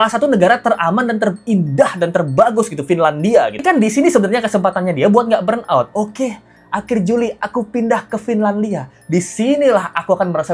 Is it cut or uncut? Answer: cut